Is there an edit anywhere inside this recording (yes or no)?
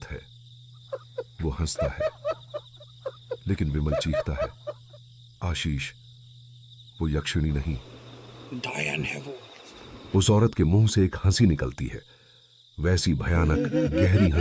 no